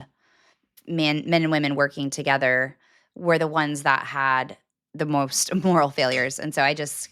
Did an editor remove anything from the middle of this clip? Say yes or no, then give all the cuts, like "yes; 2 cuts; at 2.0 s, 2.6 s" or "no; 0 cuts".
no; 0 cuts